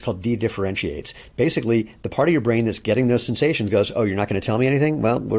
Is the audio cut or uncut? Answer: uncut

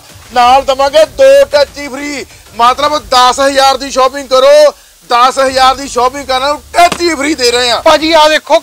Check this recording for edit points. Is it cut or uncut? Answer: uncut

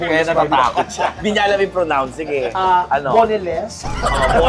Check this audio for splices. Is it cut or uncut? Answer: cut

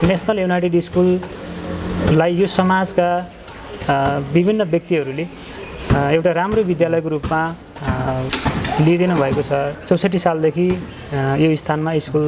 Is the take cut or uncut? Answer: cut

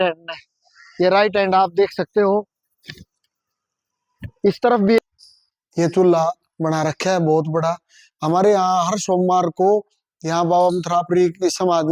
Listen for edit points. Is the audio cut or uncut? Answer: cut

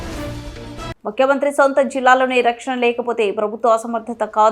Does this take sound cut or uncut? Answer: cut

